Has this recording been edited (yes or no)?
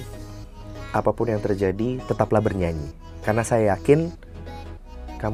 no